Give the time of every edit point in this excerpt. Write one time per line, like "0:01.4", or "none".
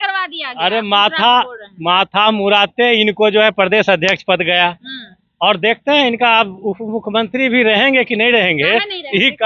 none